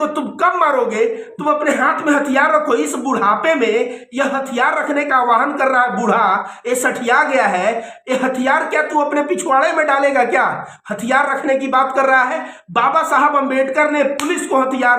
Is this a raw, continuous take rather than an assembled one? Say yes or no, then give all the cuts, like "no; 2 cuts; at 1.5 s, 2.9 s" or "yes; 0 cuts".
no; 1 cut; at 1.3 s